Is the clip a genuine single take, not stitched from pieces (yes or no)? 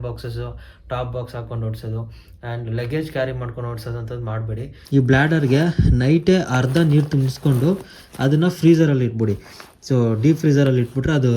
no